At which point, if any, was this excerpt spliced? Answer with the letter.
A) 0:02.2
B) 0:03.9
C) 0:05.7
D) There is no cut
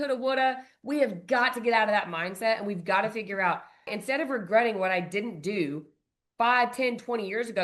B